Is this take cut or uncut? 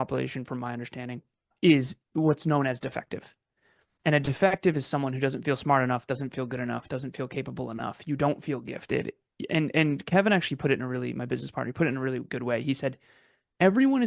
cut